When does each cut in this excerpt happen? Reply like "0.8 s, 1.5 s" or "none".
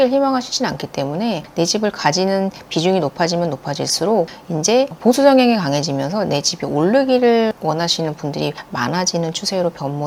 none